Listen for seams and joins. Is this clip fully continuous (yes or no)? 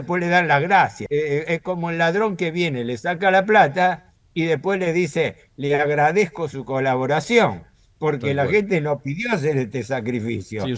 no